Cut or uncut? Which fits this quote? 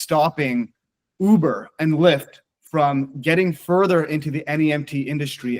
uncut